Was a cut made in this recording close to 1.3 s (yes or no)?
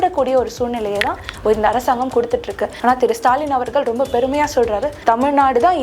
no